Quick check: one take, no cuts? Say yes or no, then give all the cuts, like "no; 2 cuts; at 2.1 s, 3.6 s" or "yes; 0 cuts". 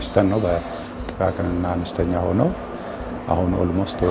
no; 1 cut; at 3.1 s